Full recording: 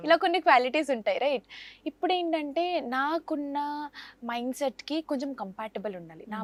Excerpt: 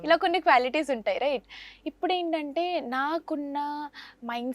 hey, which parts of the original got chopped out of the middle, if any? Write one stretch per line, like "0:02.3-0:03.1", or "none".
none